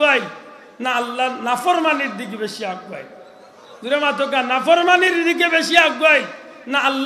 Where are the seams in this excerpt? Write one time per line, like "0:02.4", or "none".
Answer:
none

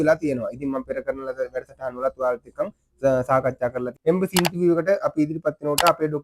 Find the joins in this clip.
0:03.9

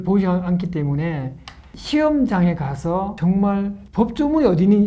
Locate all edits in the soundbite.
0:03.1
0:03.8

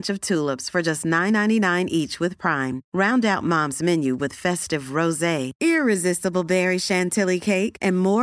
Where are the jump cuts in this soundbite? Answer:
none

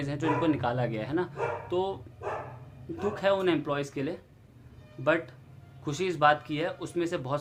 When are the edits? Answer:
none

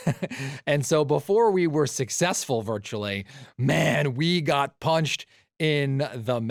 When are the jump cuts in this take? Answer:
none

